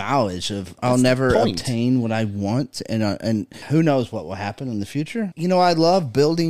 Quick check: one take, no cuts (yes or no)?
no